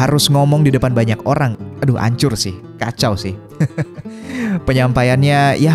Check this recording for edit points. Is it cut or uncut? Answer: cut